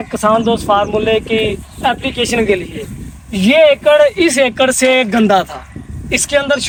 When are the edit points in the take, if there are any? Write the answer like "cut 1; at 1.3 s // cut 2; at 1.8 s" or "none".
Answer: none